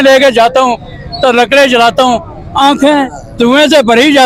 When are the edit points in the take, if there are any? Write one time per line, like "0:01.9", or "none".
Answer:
none